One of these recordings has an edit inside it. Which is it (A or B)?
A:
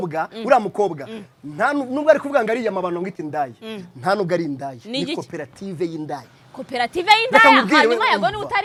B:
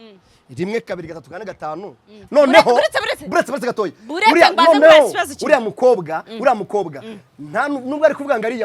B